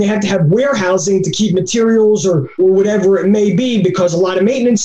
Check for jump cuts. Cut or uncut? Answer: cut